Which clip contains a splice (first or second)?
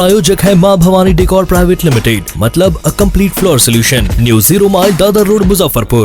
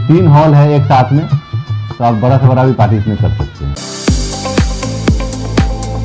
second